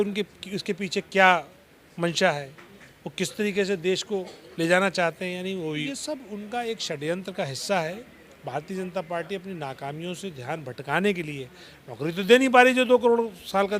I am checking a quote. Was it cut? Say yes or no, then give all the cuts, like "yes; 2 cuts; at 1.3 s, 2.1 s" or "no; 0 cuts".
yes; 1 cut; at 5.8 s